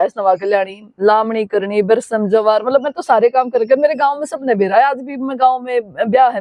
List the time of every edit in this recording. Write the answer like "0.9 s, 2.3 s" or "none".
none

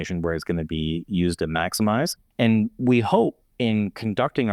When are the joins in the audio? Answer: 2.2 s, 3.4 s

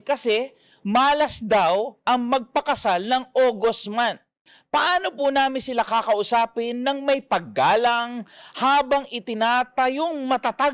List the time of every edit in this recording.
none

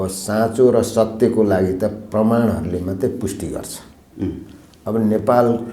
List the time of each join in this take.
none

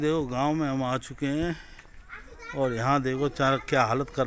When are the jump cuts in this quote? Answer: none

